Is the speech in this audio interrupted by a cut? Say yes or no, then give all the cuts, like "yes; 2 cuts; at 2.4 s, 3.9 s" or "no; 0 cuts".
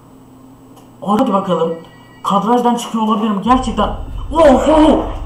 yes; 1 cut; at 1.2 s